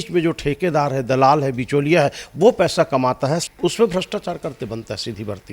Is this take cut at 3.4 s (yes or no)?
yes